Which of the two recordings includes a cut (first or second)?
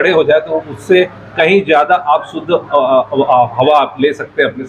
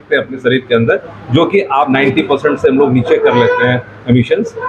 second